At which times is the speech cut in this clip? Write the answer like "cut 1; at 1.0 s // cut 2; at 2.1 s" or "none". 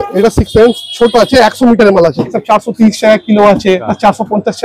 cut 1; at 2.3 s // cut 2; at 3.9 s